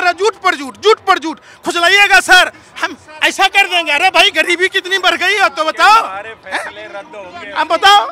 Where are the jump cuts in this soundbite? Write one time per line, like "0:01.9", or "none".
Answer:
none